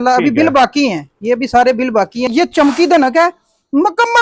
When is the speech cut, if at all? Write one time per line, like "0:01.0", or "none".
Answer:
0:02.3